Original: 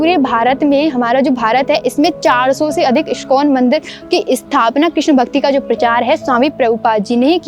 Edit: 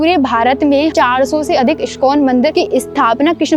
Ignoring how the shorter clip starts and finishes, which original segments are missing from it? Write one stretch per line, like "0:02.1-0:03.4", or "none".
0:00.9-0:02.2
0:03.8-0:04.1